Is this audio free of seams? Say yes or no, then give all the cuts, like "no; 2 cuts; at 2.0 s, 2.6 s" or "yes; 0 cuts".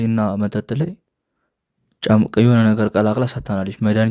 yes; 0 cuts